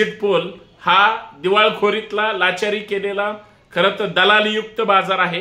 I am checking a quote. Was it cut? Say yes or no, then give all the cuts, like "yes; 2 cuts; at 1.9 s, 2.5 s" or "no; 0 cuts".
no; 0 cuts